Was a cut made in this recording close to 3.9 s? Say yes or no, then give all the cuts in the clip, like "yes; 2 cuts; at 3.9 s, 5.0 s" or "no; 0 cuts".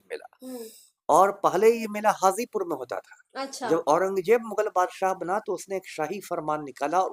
no; 0 cuts